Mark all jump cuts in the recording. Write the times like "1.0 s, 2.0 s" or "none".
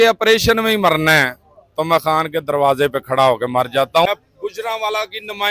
4.1 s